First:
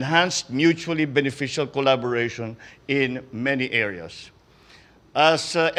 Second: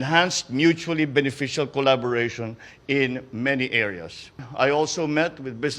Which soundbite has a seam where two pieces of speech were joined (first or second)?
second